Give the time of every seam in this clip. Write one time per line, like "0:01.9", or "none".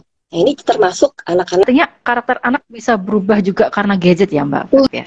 0:01.7